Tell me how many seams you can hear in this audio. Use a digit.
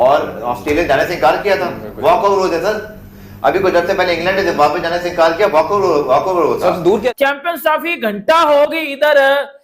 1